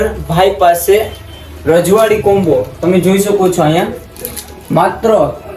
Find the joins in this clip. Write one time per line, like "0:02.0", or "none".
none

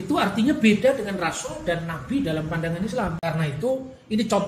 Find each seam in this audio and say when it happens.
0:03.2

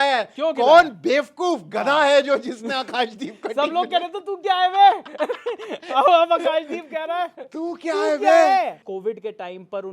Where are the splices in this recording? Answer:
0:08.8

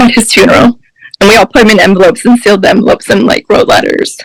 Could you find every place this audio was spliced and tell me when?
none

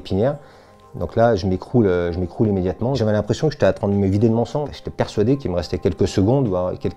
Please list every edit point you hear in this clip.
0:03.0
0:04.8

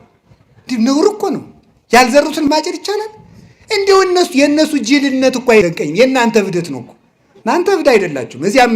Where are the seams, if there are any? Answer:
0:02.5

